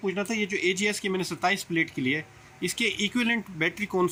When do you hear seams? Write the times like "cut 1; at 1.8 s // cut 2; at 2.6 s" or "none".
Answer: none